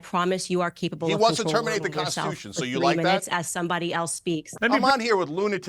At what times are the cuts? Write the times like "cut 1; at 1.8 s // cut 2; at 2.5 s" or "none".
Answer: cut 1; at 4.7 s